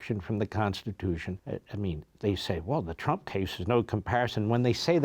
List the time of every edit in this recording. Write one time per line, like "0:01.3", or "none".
0:01.4